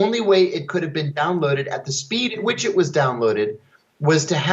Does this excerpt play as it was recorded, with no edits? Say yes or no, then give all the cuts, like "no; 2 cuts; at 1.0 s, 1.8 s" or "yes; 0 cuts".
yes; 0 cuts